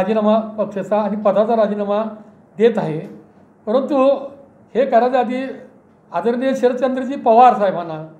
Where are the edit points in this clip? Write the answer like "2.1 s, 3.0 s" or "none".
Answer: none